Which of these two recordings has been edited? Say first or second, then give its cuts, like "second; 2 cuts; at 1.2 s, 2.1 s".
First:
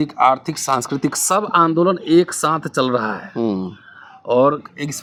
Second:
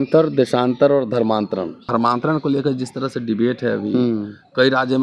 second; 1 cut; at 1.8 s